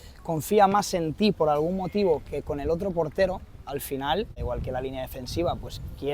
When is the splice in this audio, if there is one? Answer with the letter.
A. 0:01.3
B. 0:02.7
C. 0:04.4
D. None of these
C